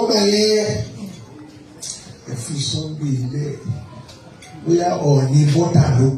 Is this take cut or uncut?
uncut